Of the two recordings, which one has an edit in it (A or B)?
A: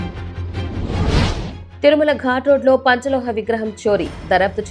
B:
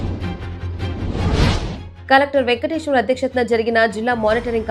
A